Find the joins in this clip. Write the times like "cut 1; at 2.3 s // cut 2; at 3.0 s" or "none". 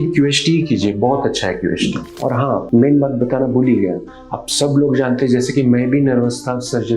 cut 1; at 2.1 s